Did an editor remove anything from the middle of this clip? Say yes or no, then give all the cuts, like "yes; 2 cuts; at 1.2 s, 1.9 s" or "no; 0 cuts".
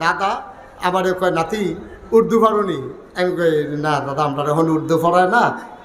no; 0 cuts